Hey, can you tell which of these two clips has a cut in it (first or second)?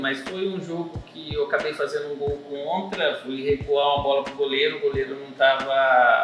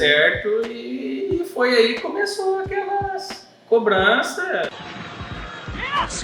second